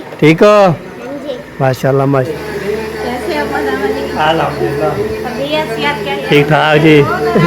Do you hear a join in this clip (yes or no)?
yes